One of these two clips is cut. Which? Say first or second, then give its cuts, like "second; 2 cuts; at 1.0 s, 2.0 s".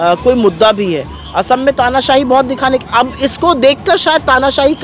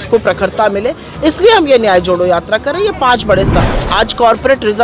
second; 1 cut; at 3.6 s